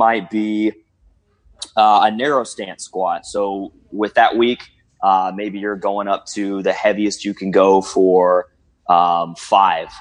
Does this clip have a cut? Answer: no; 0 cuts

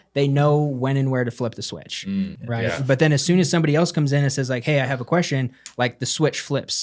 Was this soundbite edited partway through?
yes; 1 cut; at 2.3 s

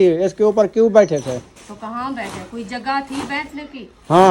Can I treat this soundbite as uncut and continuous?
yes; 0 cuts

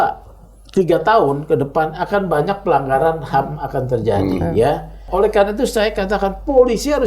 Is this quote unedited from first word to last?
no; 1 cut; at 5.0 s

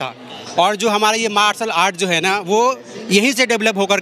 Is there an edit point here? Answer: no; 0 cuts

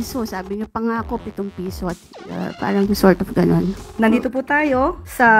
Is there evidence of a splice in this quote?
yes; 1 cut; at 3.8 s

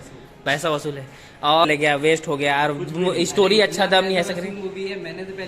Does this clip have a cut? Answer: yes; 1 cut; at 1.7 s

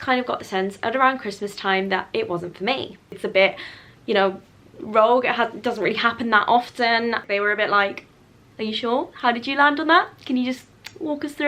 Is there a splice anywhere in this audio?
yes; 2 cuts; at 3.2 s, 7.2 s

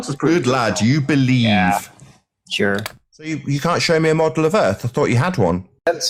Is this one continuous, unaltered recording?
yes; 0 cuts

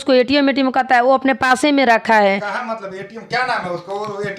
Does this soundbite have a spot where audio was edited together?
no; 0 cuts

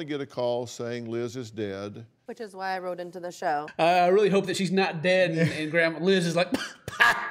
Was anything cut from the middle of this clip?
yes; 1 cut; at 3.7 s

